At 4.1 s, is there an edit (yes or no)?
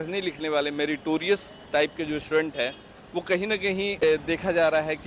yes